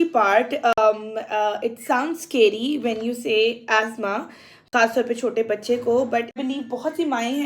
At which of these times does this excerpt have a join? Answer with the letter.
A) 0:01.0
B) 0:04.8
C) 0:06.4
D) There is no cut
C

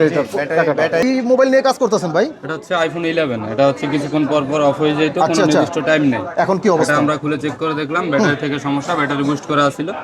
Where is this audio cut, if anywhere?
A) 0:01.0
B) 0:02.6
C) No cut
A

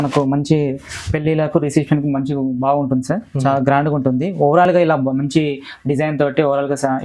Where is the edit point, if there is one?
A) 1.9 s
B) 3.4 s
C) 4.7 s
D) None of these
D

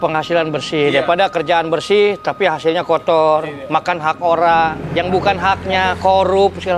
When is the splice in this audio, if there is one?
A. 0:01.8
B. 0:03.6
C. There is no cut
C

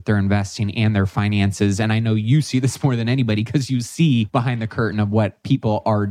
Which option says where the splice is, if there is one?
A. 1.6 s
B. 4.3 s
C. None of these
B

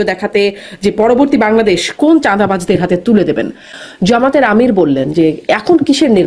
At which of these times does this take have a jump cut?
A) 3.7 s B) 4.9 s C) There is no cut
A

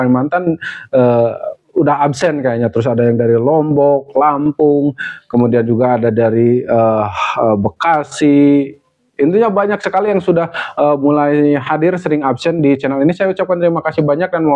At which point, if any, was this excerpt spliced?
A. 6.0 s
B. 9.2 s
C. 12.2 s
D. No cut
D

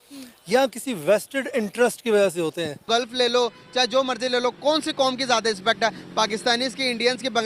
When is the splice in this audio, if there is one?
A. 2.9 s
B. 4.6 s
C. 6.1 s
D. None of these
A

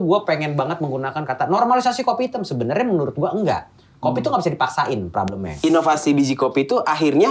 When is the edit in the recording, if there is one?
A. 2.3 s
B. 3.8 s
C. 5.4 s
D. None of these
C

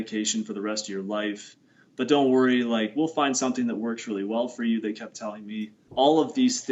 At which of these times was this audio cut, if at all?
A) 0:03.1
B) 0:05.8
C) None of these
B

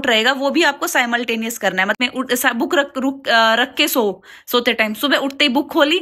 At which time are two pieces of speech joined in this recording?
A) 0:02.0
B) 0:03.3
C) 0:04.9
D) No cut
A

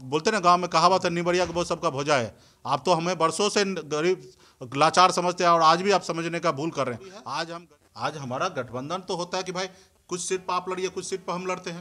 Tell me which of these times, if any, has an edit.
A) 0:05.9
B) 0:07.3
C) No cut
B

